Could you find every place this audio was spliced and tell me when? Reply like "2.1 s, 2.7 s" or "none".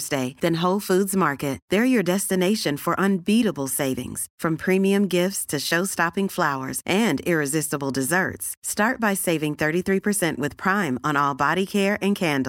none